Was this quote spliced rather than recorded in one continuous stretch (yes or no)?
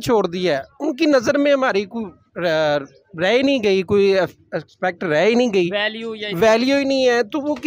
no